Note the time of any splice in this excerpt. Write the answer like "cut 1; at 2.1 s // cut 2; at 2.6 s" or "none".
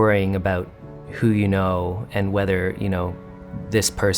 none